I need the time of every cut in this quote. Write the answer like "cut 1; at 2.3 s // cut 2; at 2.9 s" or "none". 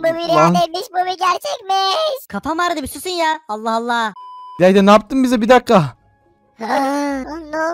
none